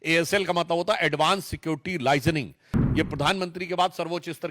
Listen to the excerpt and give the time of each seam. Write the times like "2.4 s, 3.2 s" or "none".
2.8 s